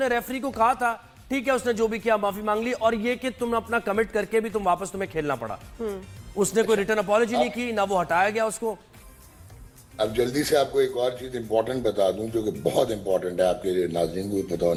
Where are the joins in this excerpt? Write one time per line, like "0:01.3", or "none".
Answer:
none